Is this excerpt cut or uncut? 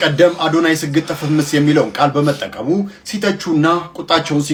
uncut